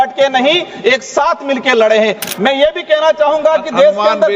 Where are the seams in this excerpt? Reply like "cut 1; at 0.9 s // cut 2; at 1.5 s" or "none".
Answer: cut 1; at 2.2 s